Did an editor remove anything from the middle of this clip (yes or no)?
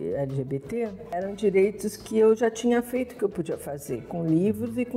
yes